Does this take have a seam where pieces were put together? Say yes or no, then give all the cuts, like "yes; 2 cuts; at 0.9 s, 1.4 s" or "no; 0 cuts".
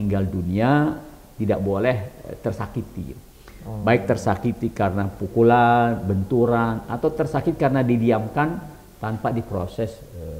no; 0 cuts